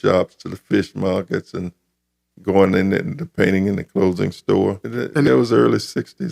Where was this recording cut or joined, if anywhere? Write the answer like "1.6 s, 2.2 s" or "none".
5.3 s